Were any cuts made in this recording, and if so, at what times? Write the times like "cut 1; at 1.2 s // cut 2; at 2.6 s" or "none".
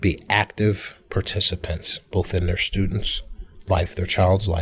cut 1; at 0.9 s

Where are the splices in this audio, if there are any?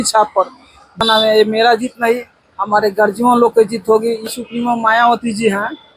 cut 1; at 1.0 s // cut 2; at 4.3 s

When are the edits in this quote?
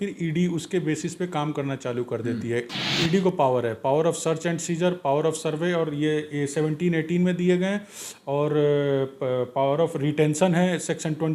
cut 1; at 2.7 s

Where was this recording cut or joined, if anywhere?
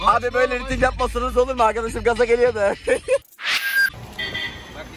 cut 1; at 3.6 s

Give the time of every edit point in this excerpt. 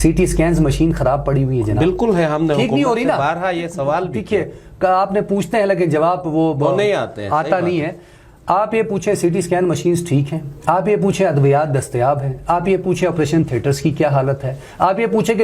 none

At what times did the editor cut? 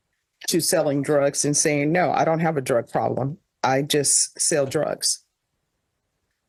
none

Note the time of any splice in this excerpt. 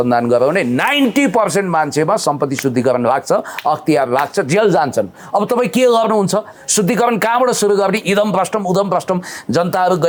none

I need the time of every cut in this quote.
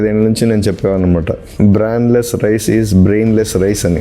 cut 1; at 1.4 s

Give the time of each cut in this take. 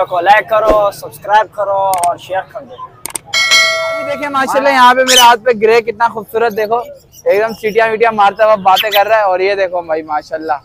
cut 1; at 4.3 s

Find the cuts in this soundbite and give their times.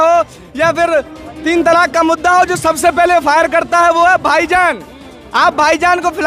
none

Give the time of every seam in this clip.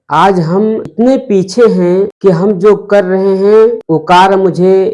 cut 1; at 0.9 s // cut 2; at 2.1 s // cut 3; at 3.8 s

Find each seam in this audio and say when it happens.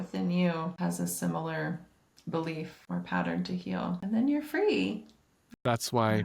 cut 1; at 0.8 s // cut 2; at 2.8 s // cut 3; at 4.0 s // cut 4; at 5.5 s

